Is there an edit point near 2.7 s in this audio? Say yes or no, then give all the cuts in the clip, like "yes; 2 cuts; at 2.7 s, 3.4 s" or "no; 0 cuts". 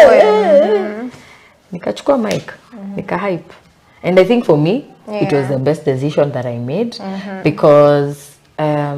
no; 0 cuts